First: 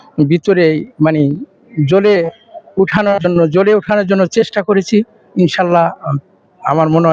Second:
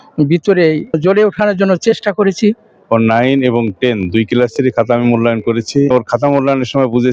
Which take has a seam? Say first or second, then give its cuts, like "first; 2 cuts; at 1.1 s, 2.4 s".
second; 3 cuts; at 1.0 s, 2.7 s, 5.9 s